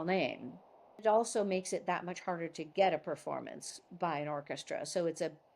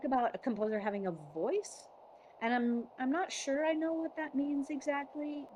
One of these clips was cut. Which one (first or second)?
first